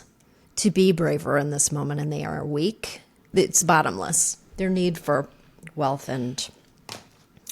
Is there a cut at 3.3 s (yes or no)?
yes